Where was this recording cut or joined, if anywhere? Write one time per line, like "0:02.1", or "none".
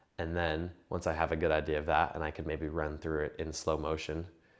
none